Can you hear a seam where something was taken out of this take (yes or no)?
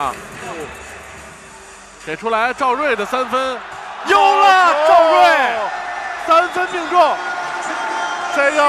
yes